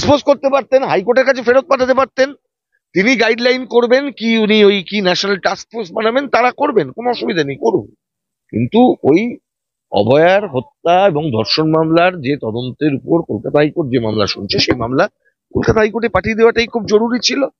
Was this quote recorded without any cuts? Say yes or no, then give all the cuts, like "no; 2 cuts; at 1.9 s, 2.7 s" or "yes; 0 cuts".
yes; 0 cuts